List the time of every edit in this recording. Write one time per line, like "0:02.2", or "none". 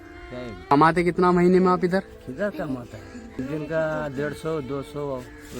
0:00.7
0:03.3